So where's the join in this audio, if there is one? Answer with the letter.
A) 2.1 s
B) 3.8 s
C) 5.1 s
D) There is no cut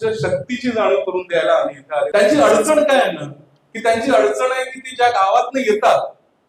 A